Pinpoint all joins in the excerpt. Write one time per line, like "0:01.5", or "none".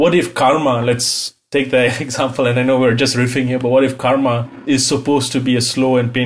0:04.6